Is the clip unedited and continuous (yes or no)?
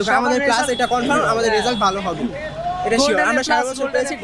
yes